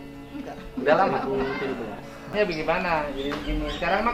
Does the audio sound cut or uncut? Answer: cut